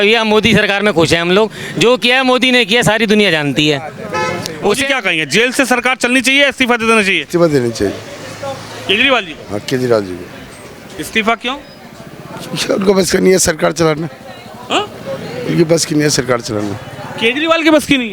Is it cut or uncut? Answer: cut